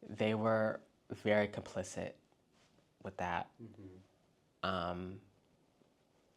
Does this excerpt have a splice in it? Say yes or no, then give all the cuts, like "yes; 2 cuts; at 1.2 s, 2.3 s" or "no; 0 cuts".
no; 0 cuts